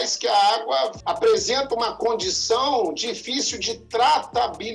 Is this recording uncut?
no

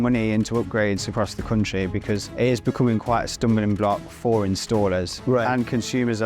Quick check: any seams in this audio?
yes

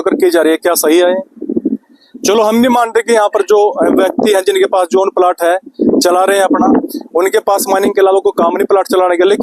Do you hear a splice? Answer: no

